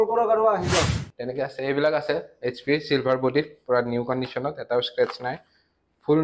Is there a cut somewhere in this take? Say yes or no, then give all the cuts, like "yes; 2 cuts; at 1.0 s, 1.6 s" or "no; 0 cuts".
yes; 1 cut; at 1.0 s